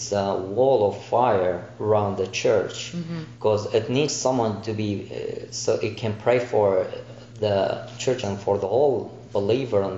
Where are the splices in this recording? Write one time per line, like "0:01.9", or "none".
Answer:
0:08.2